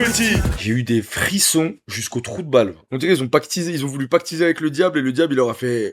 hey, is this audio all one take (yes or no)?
no